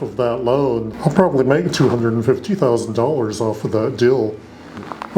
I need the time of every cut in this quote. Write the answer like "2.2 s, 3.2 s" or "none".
0.9 s

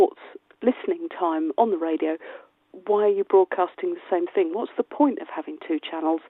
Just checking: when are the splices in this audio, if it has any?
1.0 s

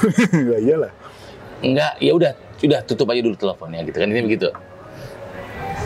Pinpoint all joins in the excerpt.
none

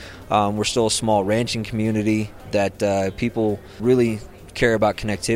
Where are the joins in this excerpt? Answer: 2.4 s, 3.8 s

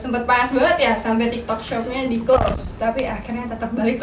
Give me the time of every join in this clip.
none

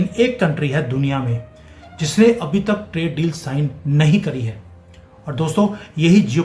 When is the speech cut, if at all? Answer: none

